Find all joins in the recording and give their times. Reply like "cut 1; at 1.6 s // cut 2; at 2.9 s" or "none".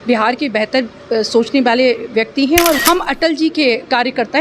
cut 1; at 2.8 s

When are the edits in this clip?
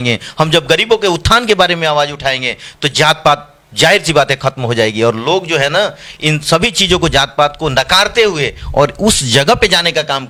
none

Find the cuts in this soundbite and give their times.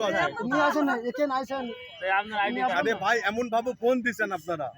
none

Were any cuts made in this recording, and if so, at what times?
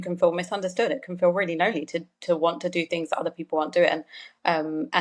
none

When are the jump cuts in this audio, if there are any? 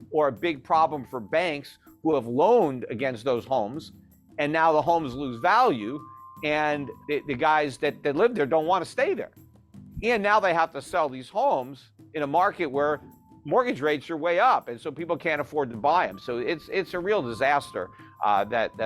cut 1; at 6.9 s

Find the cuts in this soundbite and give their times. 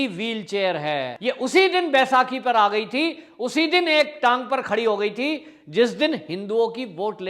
cut 1; at 1.1 s

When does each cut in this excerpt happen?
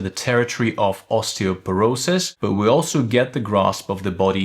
cut 1; at 2.3 s

